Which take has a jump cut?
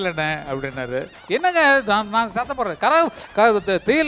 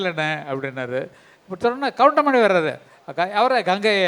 first; 1 cut; at 1.2 s

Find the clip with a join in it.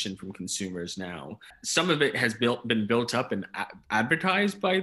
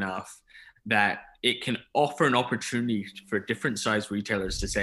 first; 1 cut; at 1.6 s

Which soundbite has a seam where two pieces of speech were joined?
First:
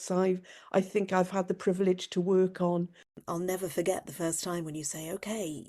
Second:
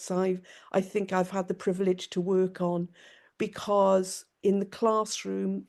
first; 1 cut; at 3.2 s

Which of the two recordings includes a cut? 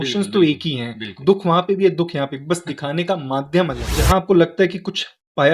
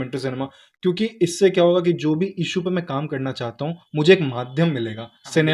first; 1 cut; at 3.9 s

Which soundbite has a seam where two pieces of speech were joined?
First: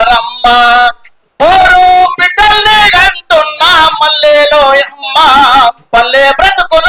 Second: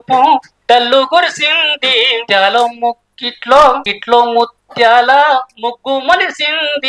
second; 2 cuts; at 2.2 s, 3.9 s

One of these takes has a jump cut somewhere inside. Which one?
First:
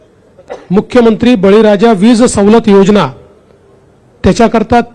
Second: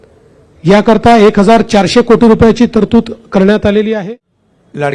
second; 1 cut; at 4.0 s

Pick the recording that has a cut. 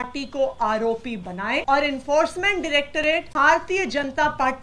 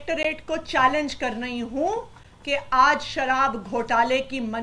first; 2 cuts; at 1.6 s, 3.3 s

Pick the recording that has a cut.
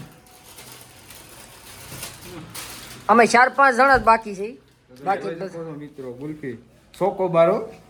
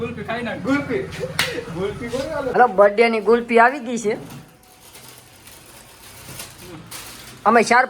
second; 1 cut; at 2.5 s

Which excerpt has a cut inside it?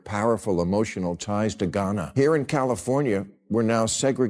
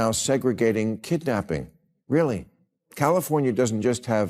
first; 1 cut; at 2.1 s

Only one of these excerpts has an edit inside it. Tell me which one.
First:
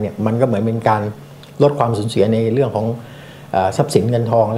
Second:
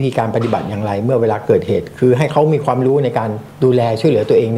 second; 1 cut; at 3.4 s

